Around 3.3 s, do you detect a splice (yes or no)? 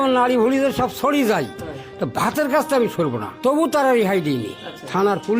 yes